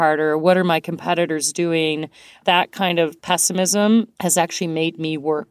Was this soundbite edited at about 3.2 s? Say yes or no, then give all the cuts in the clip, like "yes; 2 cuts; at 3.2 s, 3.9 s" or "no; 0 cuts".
yes; 3 cuts; at 2.3 s, 3.2 s, 4.1 s